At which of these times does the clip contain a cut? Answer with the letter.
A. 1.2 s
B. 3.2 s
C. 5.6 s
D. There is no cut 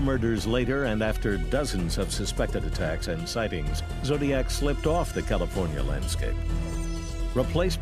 C